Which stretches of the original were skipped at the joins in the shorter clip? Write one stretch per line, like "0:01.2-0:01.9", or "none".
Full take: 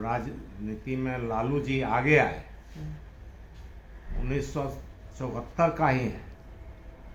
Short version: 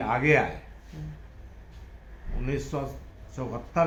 none